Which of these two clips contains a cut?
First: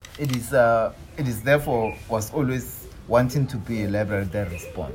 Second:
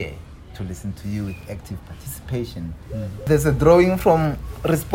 second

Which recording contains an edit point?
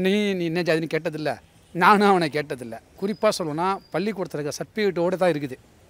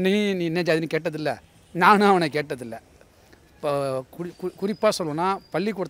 first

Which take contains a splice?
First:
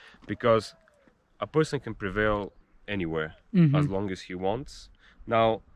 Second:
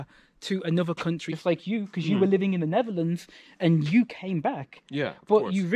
second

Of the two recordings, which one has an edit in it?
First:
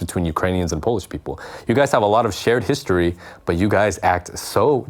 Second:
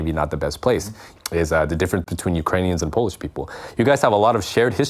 second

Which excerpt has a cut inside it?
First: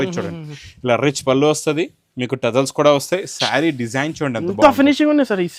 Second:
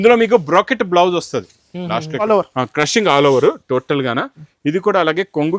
second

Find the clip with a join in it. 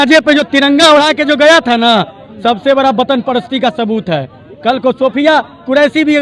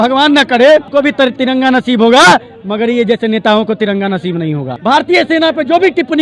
second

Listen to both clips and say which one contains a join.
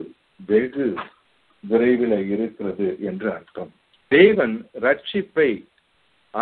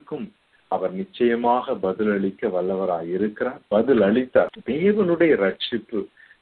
second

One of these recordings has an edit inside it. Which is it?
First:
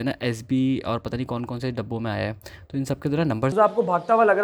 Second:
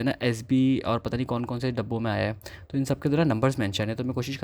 first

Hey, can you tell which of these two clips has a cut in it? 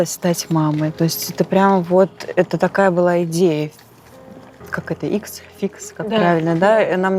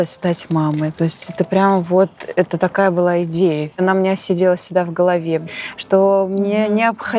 second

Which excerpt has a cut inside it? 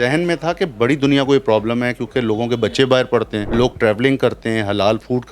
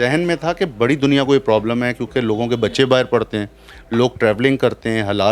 first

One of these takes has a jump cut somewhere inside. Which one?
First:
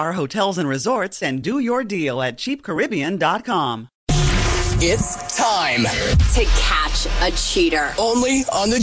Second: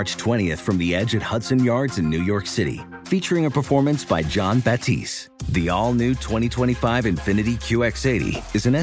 first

